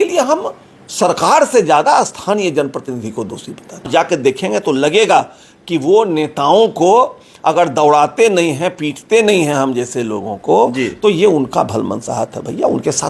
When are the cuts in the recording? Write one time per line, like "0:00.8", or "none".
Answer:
0:03.9